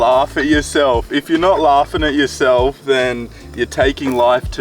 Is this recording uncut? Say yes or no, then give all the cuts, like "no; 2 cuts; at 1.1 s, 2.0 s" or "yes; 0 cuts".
yes; 0 cuts